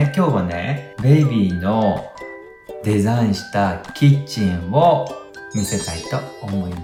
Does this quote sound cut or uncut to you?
uncut